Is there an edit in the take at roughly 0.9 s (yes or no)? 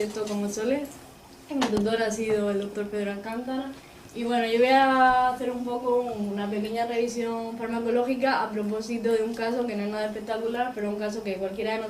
yes